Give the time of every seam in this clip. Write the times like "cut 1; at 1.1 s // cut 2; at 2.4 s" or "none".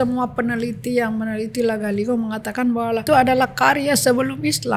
cut 1; at 3.0 s